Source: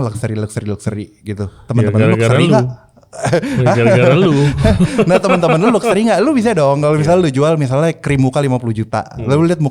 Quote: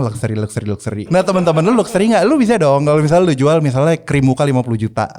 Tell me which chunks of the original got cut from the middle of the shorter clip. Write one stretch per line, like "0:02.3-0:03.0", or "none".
0:01.1-0:05.1